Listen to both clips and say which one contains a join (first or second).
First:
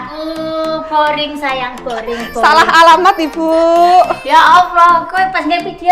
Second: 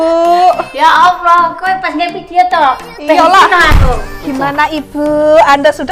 second